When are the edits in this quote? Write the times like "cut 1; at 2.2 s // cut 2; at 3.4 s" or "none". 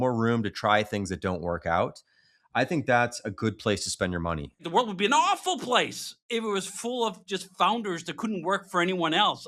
cut 1; at 4.6 s

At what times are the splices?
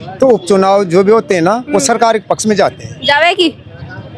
none

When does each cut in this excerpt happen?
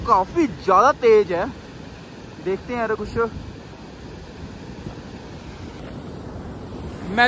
none

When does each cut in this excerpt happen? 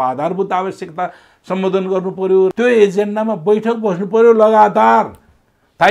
cut 1; at 2.5 s

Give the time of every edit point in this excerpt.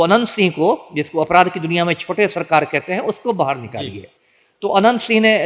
none

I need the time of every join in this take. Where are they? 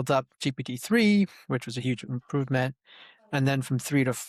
none

